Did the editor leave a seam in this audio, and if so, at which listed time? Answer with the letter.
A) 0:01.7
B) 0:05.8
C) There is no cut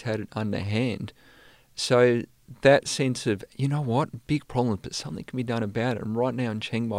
C